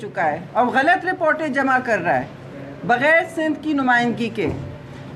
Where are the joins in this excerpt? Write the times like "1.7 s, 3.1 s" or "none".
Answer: none